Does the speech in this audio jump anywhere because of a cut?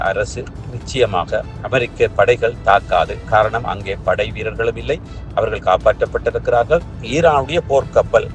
yes; 1 cut; at 7.0 s

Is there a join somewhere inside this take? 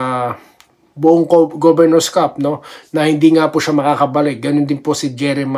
no; 0 cuts

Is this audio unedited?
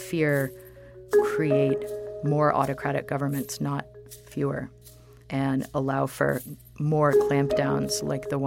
yes; 0 cuts

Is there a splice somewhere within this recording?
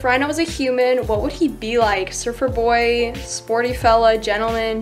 no; 0 cuts

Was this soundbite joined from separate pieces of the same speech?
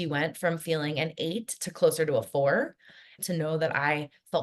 yes; 1 cut; at 3.2 s

